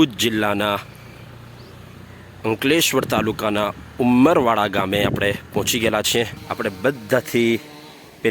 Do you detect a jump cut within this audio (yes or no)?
yes